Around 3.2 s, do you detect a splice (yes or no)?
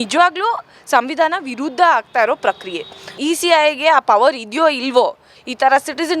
yes